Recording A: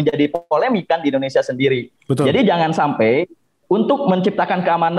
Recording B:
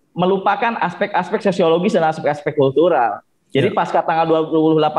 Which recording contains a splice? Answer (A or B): A